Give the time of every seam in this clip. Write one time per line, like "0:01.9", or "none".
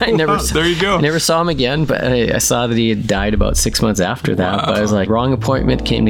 0:05.1